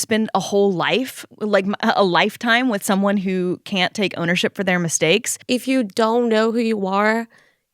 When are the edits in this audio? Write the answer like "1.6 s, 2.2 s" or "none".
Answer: 5.3 s